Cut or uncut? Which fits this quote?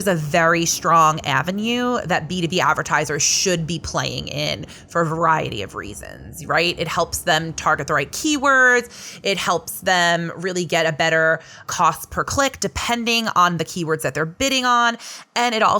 uncut